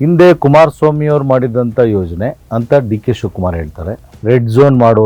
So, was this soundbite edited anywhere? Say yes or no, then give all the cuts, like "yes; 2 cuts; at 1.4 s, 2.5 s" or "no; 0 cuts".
yes; 2 cuts; at 2.4 s, 4.1 s